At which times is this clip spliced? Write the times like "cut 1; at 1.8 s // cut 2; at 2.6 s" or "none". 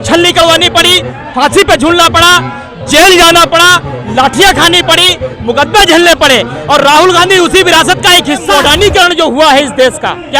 cut 1; at 8.5 s